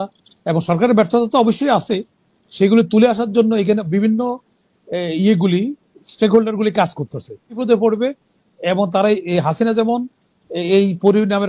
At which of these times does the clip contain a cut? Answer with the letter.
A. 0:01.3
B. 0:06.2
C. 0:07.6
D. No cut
C